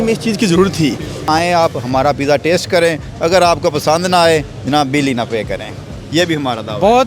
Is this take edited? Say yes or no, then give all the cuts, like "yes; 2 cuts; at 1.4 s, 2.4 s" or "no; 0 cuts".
yes; 1 cut; at 1.2 s